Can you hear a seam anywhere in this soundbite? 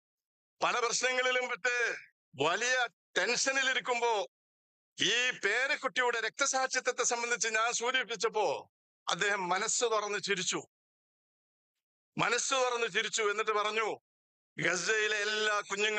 no; 0 cuts

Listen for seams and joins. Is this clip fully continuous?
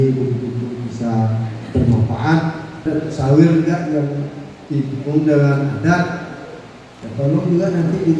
no; 1 cut; at 2.9 s

